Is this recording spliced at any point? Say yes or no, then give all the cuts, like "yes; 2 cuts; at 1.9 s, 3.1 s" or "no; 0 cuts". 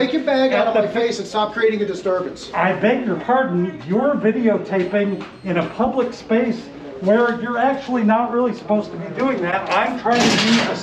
no; 0 cuts